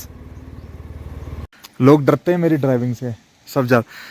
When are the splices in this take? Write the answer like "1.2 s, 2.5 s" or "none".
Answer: 1.5 s